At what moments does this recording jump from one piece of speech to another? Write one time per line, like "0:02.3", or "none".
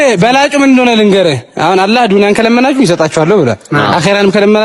none